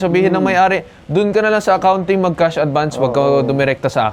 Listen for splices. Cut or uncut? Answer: uncut